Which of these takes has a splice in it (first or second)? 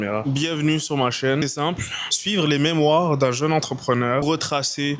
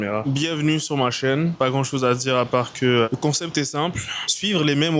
first